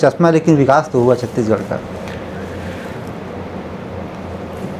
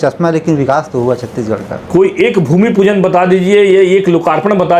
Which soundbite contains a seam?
second; 1 cut; at 1.7 s

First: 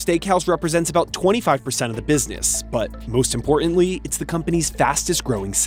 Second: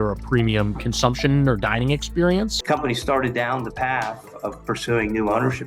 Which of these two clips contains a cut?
second; 1 cut; at 2.6 s

